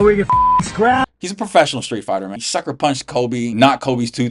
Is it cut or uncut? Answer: cut